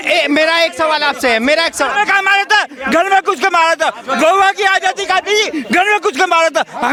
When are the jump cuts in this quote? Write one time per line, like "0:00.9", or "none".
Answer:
none